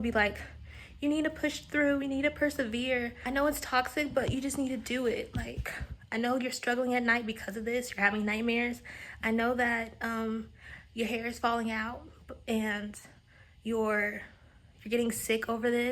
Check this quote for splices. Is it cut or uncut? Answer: cut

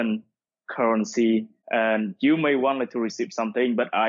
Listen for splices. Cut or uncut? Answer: cut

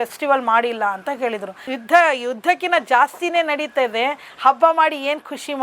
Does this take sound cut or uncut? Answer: cut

